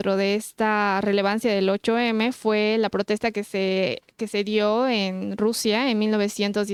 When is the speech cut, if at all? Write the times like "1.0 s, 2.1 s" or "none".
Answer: none